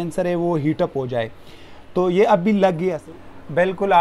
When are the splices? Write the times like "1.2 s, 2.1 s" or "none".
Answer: 3.0 s